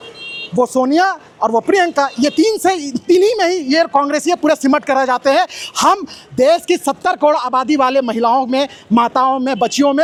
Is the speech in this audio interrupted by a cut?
no; 0 cuts

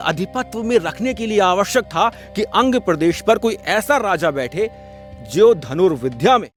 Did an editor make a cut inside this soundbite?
no; 0 cuts

